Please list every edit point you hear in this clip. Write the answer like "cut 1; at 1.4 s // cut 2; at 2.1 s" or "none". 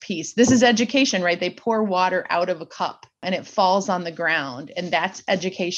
cut 1; at 3.2 s